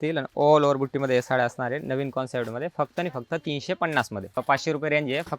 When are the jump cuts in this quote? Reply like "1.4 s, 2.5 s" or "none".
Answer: 4.4 s